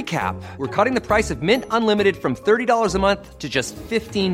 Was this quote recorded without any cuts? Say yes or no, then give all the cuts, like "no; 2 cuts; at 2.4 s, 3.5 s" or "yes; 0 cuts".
yes; 0 cuts